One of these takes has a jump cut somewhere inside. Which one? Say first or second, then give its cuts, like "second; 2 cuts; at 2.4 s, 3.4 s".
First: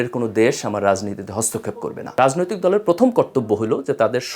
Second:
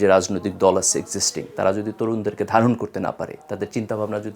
first; 1 cut; at 2.1 s